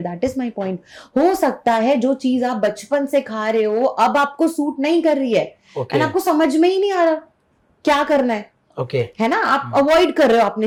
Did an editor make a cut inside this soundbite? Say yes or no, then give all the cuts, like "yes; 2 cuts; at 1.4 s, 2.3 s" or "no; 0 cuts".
no; 0 cuts